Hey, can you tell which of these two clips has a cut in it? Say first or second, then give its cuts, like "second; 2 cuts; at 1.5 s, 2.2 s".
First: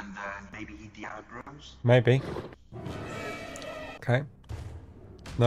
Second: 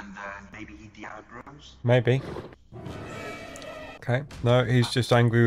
second; 1 cut; at 4.3 s